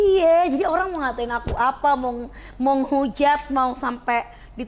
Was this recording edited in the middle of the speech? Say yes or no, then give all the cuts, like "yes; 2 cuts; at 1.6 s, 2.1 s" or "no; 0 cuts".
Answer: no; 0 cuts